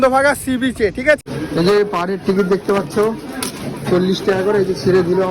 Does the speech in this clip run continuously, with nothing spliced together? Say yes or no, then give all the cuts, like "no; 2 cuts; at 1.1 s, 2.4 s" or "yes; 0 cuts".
no; 1 cut; at 1.2 s